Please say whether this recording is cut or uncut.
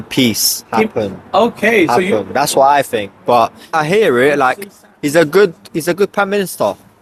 uncut